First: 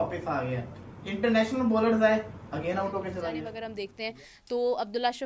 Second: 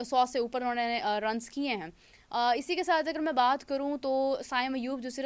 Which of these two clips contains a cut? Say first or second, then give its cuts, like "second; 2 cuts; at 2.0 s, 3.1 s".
first; 1 cut; at 3.6 s